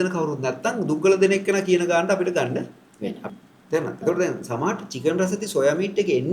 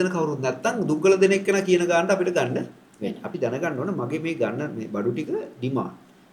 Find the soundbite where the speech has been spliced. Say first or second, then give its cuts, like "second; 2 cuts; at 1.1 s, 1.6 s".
first; 1 cut; at 3.3 s